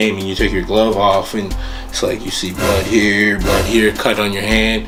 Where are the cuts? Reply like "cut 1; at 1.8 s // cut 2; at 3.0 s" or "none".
none